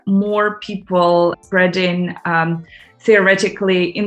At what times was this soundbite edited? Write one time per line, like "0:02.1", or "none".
0:01.4